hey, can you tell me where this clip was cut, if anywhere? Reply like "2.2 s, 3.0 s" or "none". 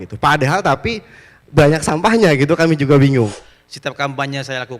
3.3 s